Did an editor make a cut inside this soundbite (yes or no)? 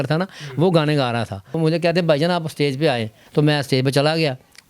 yes